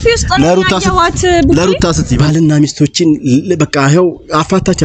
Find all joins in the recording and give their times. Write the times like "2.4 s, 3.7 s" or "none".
2.2 s